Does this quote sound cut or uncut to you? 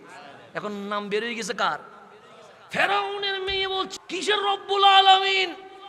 cut